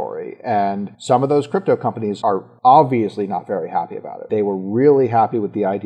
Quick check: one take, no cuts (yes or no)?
no